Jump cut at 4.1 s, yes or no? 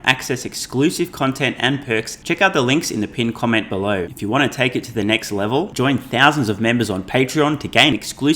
yes